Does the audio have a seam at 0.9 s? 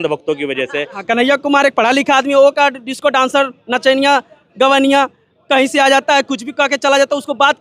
yes; 1 cut; at 0.9 s

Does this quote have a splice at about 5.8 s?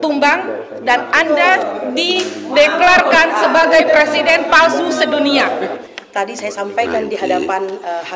yes; 1 cut; at 5.8 s

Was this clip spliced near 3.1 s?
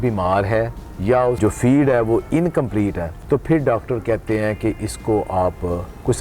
yes; 2 cuts; at 1.0 s, 3.1 s

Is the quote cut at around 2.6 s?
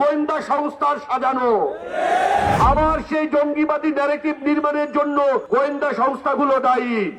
yes; 2 cuts; at 2.6 s, 5.4 s

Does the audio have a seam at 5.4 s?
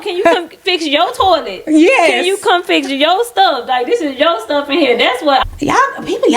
yes; 1 cut; at 5.4 s

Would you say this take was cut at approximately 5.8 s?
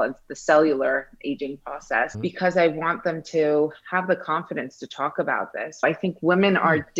yes; 2 cuts; at 2.1 s, 5.8 s

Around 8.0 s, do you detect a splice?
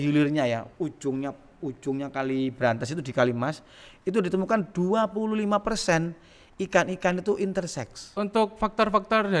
yes; 1 cut; at 8.0 s

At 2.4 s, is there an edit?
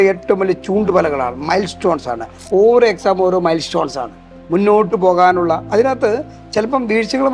yes; 1 cut; at 2.4 s

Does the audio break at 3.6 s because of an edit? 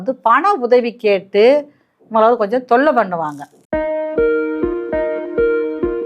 yes; 1 cut; at 3.6 s

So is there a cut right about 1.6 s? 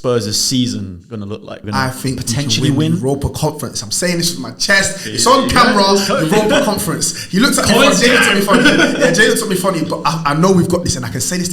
yes; 1 cut; at 1.6 s

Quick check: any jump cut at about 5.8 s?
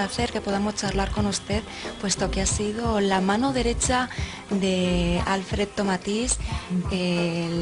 yes; 1 cut; at 5.8 s

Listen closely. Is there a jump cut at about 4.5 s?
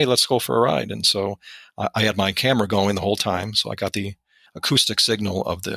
yes; 1 cut; at 4.5 s

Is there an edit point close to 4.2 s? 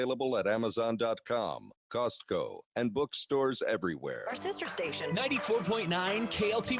yes; 1 cut; at 4.2 s

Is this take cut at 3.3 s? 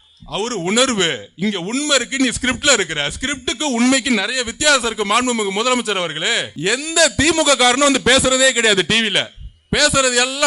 no; 1 cut; at 6.5 s

